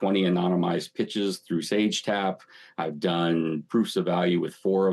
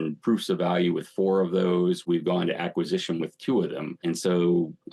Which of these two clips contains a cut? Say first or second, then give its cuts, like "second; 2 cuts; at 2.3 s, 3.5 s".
second; 1 cut; at 3.9 s